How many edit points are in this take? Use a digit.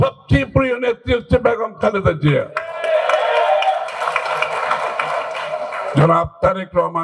0